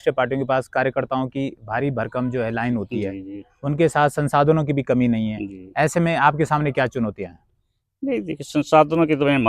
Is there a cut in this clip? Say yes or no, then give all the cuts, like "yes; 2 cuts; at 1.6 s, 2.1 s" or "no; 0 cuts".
no; 0 cuts